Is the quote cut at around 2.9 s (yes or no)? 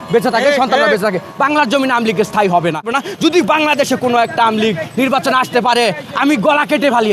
yes